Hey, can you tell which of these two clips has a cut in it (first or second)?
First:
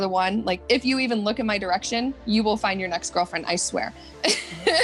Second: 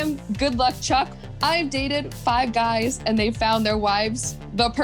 second